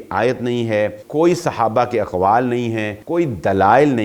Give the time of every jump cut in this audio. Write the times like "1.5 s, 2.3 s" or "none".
1.0 s, 2.9 s